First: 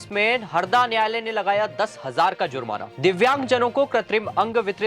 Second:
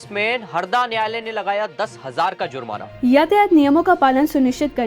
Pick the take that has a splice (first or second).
first